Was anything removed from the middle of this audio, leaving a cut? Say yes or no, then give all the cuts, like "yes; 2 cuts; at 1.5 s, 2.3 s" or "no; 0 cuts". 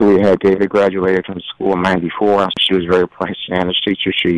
yes; 1 cut; at 2.6 s